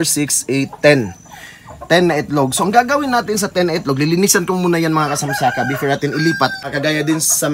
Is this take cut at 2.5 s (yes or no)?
no